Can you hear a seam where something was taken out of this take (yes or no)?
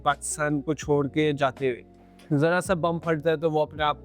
yes